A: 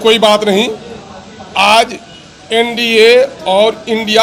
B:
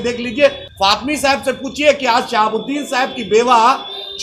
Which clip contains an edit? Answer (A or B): B